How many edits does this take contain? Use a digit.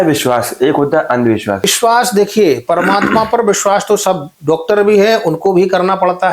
1